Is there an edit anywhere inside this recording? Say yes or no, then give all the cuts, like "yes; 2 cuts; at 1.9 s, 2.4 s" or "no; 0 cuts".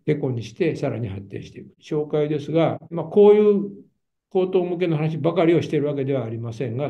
yes; 1 cut; at 1.8 s